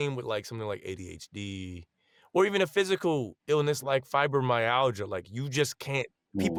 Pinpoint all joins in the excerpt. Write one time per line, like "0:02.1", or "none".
none